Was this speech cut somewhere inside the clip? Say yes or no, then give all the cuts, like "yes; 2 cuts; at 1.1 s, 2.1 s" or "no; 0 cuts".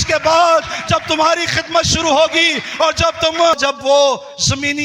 yes; 1 cut; at 3.6 s